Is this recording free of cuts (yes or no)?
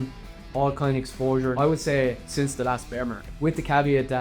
no